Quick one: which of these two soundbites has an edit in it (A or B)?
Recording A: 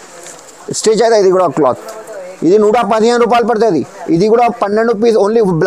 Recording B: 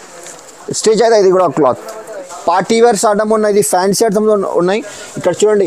B